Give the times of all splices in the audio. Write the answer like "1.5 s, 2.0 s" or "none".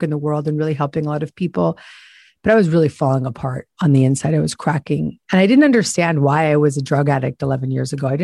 5.2 s